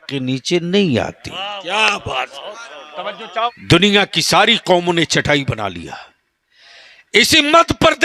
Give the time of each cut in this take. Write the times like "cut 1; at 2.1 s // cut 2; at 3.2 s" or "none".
cut 1; at 3.5 s

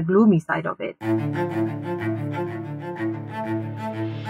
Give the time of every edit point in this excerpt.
cut 1; at 1.0 s

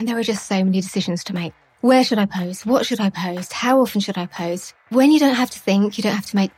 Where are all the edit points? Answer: cut 1; at 1.6 s // cut 2; at 4.9 s

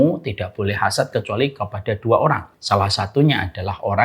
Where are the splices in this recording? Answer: cut 1; at 2.5 s

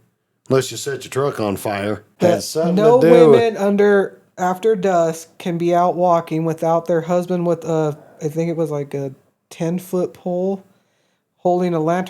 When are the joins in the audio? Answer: cut 1; at 2.1 s

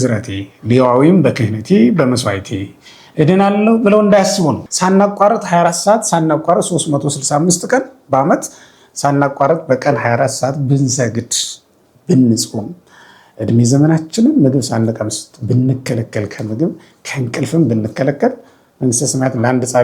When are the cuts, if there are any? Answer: cut 1; at 4.7 s

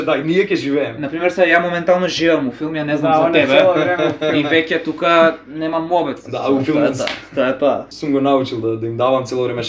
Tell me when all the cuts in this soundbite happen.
cut 1; at 7.9 s

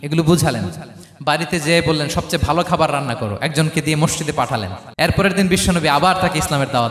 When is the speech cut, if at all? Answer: cut 1; at 4.8 s

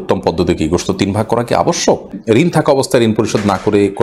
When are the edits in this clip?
cut 1; at 2.2 s

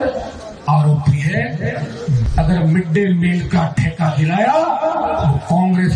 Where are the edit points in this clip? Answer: cut 1; at 2.2 s

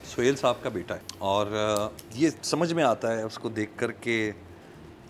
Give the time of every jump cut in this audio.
cut 1; at 1.0 s // cut 2; at 2.0 s

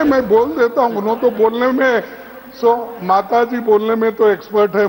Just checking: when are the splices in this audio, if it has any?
none

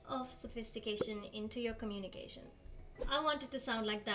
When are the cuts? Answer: cut 1; at 2.9 s

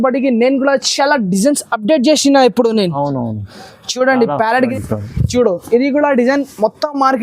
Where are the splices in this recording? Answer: cut 1; at 4.5 s

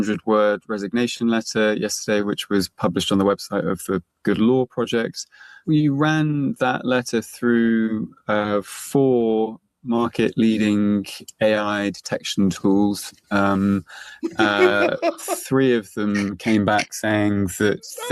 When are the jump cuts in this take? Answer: none

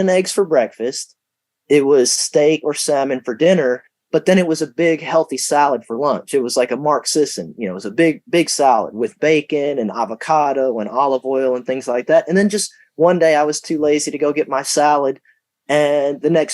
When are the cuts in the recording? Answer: none

